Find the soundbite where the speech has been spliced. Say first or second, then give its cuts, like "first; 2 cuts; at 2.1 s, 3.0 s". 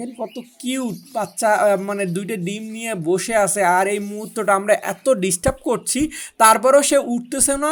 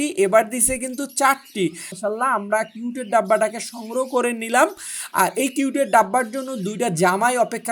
second; 1 cut; at 2.0 s